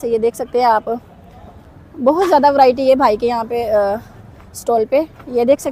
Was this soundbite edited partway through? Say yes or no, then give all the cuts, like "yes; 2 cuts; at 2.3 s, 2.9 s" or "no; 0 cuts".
no; 0 cuts